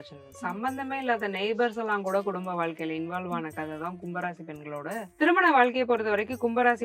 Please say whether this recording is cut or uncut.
cut